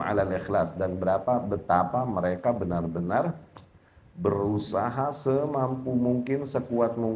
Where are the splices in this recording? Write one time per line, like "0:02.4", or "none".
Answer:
none